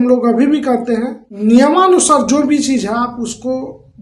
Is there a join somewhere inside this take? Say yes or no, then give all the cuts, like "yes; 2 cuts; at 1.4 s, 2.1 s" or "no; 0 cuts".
yes; 1 cut; at 1.2 s